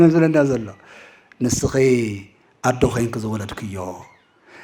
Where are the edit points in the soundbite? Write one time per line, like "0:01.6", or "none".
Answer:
none